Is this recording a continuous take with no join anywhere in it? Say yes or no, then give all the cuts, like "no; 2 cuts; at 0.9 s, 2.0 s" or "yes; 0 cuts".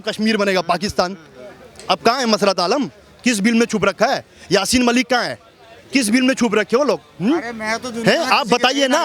yes; 0 cuts